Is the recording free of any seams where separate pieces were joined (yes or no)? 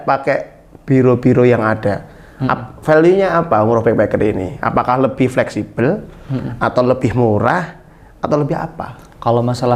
yes